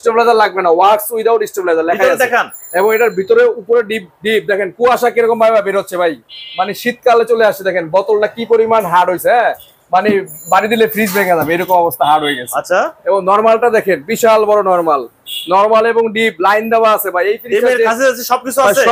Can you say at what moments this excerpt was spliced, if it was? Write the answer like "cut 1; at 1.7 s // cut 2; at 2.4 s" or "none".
none